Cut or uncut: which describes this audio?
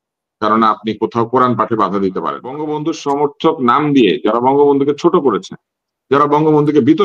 cut